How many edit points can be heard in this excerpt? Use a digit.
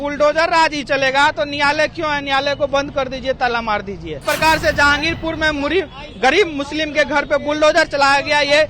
1